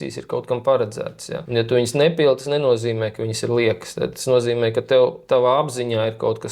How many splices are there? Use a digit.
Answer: 0